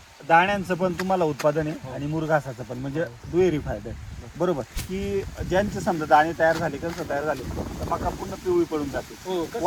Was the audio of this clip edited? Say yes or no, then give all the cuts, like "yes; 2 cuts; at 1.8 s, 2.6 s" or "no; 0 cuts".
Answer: no; 0 cuts